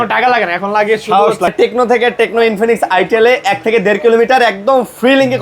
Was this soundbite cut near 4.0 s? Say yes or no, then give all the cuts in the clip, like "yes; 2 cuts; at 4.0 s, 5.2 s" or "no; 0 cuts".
no; 1 cut; at 1.5 s